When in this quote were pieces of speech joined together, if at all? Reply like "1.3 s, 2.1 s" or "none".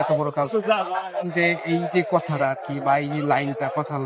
1.2 s